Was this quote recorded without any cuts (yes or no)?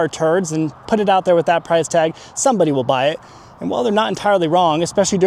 yes